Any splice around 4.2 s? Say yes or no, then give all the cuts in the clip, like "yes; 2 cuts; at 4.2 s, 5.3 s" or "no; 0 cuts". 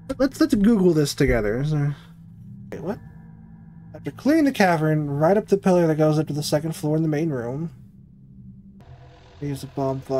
no; 2 cuts; at 2.7 s, 8.8 s